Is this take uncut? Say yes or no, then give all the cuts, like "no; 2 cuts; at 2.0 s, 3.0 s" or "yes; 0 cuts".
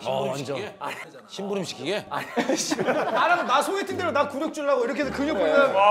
no; 1 cut; at 3.1 s